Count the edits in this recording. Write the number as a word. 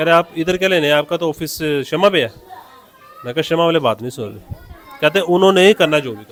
zero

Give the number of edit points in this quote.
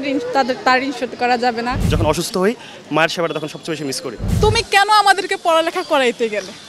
two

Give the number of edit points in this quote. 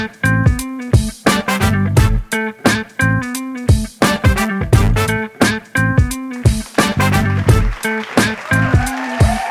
zero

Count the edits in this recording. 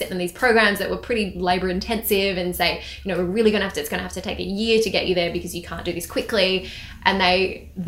zero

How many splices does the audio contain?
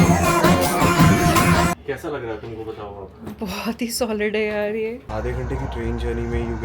two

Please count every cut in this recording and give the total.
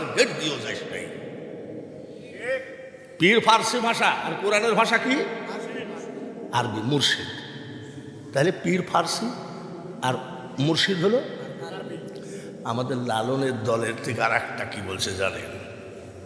zero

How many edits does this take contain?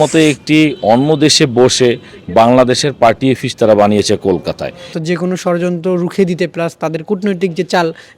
one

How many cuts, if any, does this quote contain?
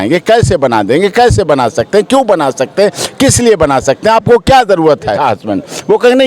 one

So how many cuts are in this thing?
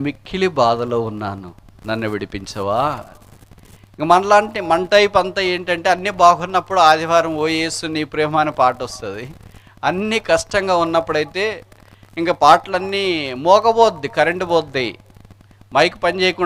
zero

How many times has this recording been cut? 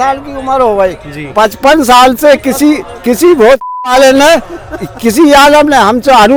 zero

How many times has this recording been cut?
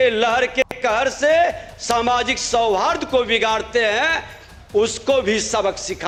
zero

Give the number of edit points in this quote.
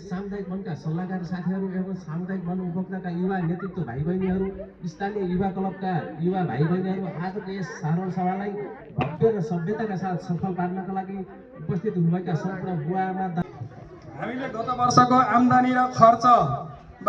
one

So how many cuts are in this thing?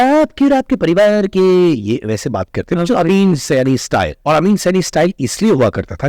one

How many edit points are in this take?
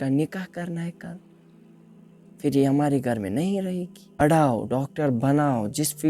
one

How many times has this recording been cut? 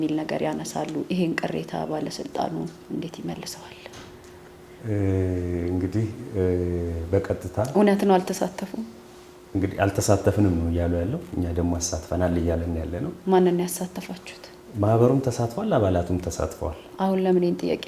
zero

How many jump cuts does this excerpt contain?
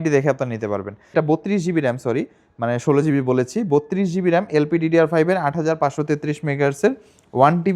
one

